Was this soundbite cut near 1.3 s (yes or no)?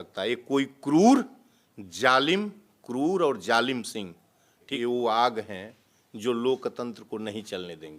no